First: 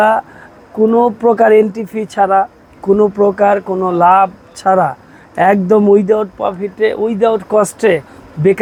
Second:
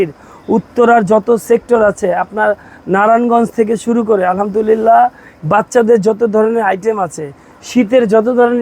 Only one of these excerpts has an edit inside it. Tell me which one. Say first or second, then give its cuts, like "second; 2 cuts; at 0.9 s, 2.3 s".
second; 1 cut; at 5.3 s